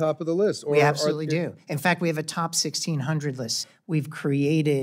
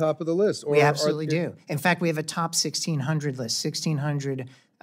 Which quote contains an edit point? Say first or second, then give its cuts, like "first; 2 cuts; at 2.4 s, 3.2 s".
first; 1 cut; at 3.6 s